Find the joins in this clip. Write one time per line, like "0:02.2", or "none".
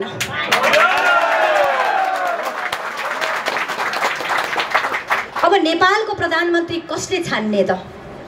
none